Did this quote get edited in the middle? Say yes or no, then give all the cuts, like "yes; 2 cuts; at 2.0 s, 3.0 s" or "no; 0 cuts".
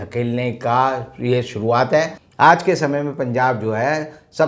yes; 1 cut; at 2.2 s